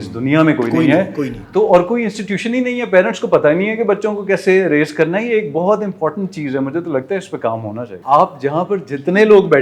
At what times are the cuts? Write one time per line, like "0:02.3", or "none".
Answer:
0:07.9